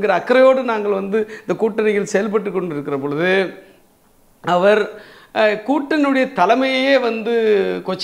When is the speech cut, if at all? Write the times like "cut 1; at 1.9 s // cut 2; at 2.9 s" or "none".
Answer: none